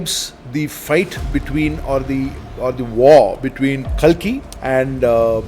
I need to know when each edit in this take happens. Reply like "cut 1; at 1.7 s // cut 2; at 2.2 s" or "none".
cut 1; at 3.9 s // cut 2; at 4.5 s